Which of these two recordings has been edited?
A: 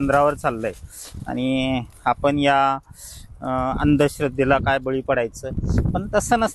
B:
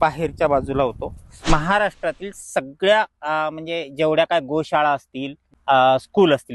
B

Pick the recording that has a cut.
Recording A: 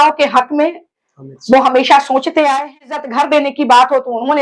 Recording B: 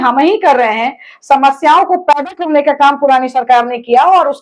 A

